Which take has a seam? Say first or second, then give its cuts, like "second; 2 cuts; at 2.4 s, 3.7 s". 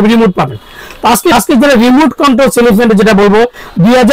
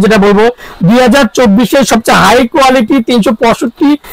first; 1 cut; at 1.3 s